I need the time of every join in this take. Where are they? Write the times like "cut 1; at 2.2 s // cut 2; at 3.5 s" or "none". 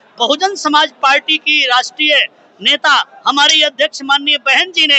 none